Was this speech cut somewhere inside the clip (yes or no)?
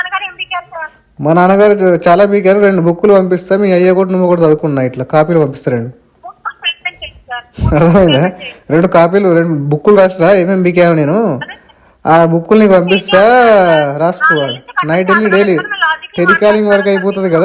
no